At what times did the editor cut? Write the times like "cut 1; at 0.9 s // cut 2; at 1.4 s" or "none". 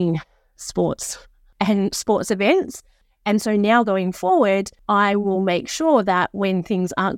cut 1; at 1.4 s // cut 2; at 3.0 s // cut 3; at 4.7 s